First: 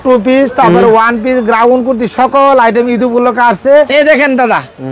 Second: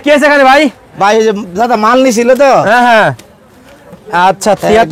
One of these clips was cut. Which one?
first; 1 cut; at 3.9 s

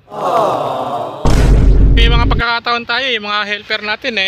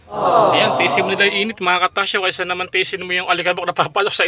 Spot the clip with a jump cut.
second; 1 cut; at 1.1 s

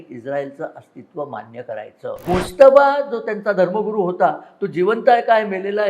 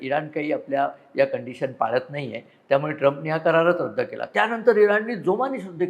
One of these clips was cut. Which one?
first; 1 cut; at 2.2 s

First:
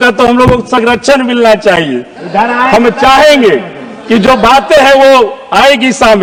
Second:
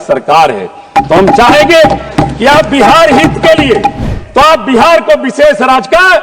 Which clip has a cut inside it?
second; 1 cut; at 4.0 s

